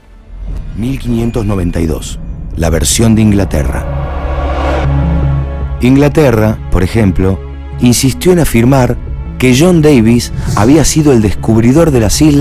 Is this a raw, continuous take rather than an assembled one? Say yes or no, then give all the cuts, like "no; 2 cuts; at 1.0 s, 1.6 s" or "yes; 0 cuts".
no; 1 cut; at 5.6 s